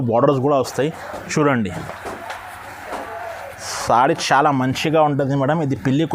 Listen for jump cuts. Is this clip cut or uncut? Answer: uncut